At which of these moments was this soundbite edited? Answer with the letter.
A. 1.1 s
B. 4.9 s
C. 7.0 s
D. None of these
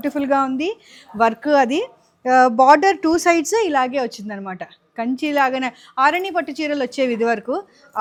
D